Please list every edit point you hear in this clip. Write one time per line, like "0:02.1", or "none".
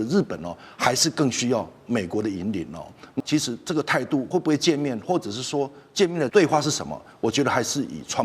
0:03.2
0:04.3
0:06.3